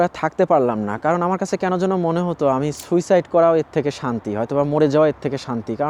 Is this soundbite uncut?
yes; 0 cuts

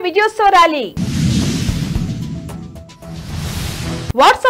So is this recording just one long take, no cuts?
yes; 0 cuts

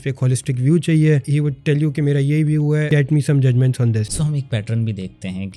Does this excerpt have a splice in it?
yes; 3 cuts; at 1.3 s, 2.9 s, 4.1 s

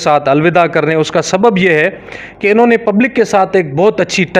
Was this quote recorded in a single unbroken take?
yes; 0 cuts

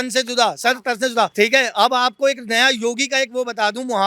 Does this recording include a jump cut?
yes; 1 cut; at 1.3 s

